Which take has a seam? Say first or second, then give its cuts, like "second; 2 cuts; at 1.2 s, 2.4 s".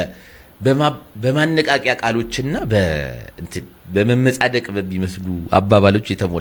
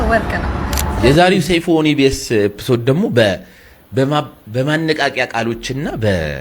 second; 1 cut; at 0.9 s